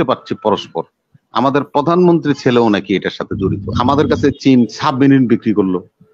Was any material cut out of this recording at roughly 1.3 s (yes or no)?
no